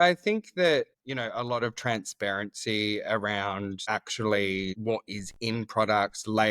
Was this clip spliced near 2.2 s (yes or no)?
no